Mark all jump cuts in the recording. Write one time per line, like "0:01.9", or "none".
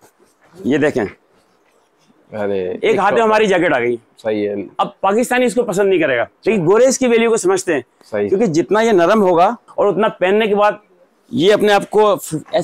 0:02.7
0:06.3
0:09.6